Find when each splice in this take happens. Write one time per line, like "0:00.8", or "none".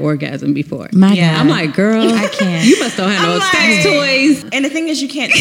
0:04.4